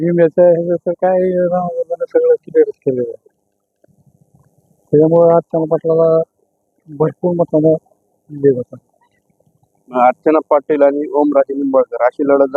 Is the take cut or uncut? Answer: uncut